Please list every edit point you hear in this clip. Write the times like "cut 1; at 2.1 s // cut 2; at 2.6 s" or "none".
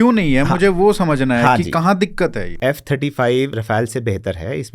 cut 1; at 2.4 s // cut 2; at 3.6 s

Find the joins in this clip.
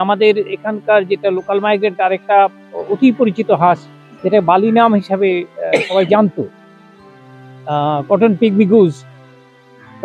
none

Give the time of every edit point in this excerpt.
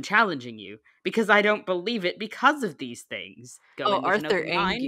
cut 1; at 3.7 s

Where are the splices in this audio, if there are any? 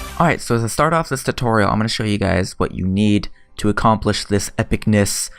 none

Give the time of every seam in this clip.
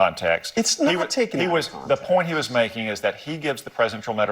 cut 1; at 1.8 s

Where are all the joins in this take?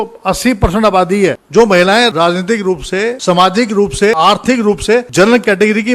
cut 1; at 1.4 s // cut 2; at 2.1 s // cut 3; at 3.2 s // cut 4; at 4.2 s // cut 5; at 5.1 s

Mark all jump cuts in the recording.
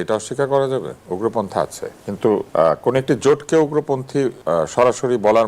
cut 1; at 1.0 s // cut 2; at 2.5 s // cut 3; at 4.4 s

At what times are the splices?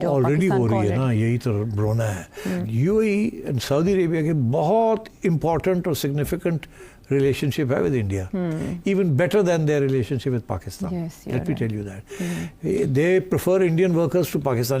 cut 1; at 2.6 s

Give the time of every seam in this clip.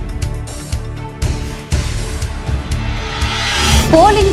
none

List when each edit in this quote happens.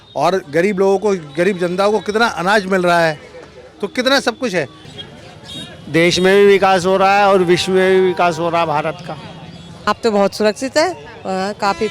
cut 1; at 4.8 s // cut 2; at 9.7 s

